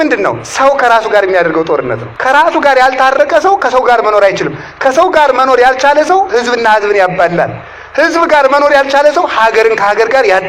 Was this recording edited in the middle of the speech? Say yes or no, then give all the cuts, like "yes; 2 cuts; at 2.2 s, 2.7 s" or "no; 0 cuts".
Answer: yes; 1 cut; at 2.1 s